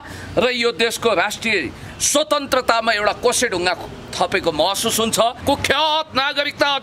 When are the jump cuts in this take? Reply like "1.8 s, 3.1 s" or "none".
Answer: 5.4 s